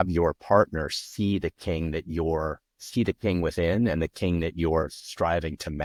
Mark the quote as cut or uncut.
uncut